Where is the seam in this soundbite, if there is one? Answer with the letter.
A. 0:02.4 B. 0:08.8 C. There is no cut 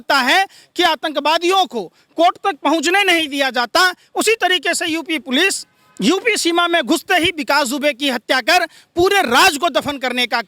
C